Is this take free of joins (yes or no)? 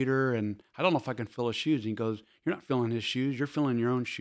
yes